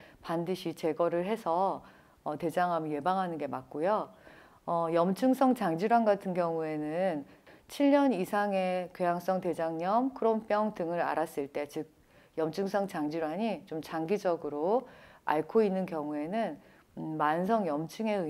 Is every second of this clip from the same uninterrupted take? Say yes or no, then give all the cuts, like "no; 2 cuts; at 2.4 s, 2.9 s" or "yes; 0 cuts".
no; 1 cut; at 7.4 s